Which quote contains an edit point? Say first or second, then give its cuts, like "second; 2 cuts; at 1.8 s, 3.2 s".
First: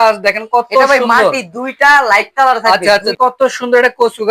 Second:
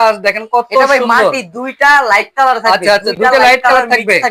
first; 1 cut; at 3.1 s